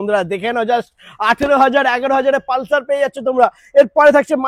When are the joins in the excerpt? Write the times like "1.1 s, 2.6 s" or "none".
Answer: none

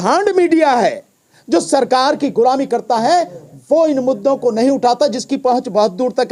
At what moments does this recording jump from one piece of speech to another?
none

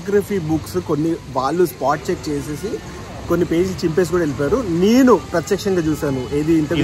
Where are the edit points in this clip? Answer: none

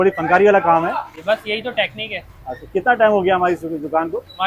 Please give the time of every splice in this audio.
none

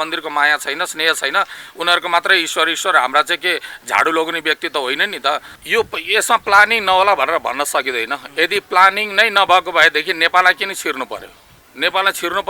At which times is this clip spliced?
5.5 s

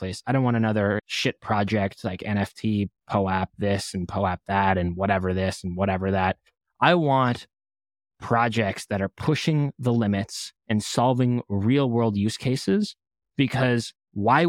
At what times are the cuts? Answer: none

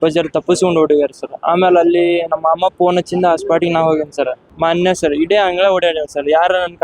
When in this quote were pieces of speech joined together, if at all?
4.4 s

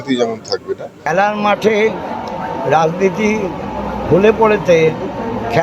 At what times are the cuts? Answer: 0.9 s

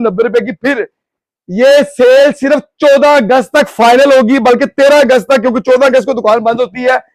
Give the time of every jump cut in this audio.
none

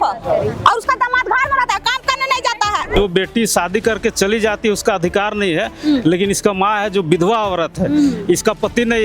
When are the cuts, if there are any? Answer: 2.9 s

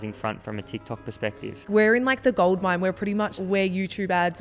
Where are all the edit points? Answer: 1.7 s, 3.3 s

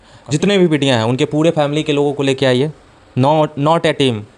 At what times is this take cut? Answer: none

